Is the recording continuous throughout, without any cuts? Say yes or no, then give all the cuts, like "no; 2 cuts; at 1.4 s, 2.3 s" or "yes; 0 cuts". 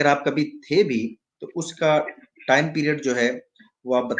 yes; 0 cuts